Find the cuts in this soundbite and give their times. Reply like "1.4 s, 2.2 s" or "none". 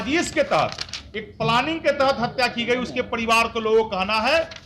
none